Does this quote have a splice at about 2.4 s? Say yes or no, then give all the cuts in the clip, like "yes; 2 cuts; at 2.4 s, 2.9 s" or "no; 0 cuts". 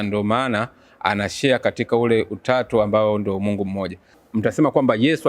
no; 1 cut; at 4.2 s